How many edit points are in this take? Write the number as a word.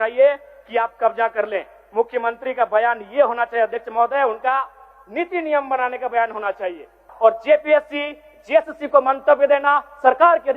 one